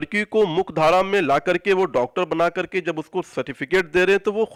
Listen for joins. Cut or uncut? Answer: uncut